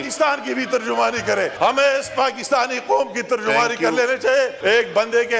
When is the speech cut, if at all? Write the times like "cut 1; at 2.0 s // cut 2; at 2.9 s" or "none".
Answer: cut 1; at 1.5 s // cut 2; at 4.6 s